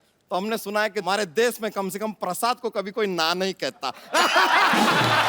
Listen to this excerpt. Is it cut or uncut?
cut